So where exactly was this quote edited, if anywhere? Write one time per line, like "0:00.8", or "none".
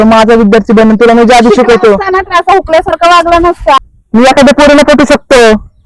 0:03.9